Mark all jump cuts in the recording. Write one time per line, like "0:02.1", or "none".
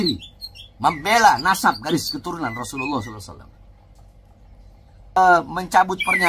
0:05.2